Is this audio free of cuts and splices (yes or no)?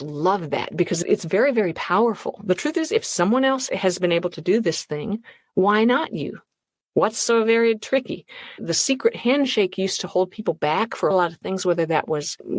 no